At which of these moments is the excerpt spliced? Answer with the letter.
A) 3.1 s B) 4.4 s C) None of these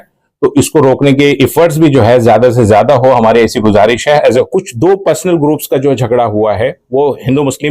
B